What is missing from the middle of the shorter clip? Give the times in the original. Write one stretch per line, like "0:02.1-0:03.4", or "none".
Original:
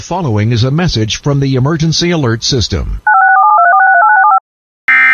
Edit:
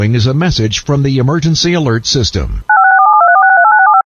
none